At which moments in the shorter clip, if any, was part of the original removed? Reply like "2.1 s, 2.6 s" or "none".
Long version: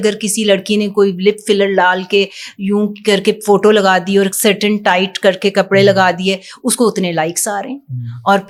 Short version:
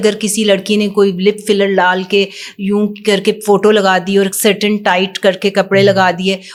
none

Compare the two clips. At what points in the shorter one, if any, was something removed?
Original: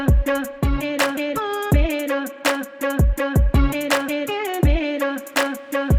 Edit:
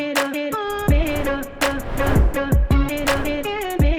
none

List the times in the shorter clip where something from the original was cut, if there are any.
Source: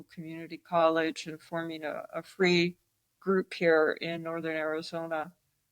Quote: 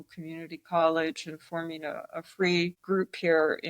2.8 s

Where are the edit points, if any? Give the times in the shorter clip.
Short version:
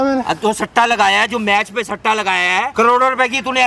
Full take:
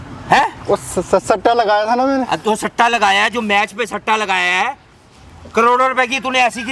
2.7 s

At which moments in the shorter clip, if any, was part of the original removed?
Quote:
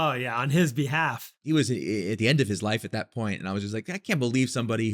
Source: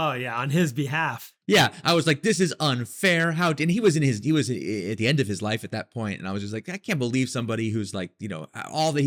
1.4 s

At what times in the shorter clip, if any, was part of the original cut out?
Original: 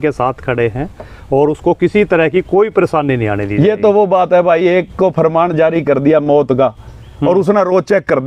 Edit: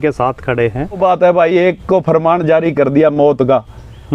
1.0 s

